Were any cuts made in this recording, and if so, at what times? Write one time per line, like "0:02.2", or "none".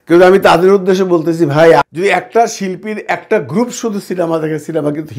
none